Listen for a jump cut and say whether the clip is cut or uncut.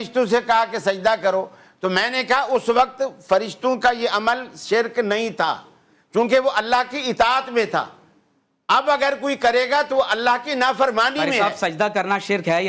uncut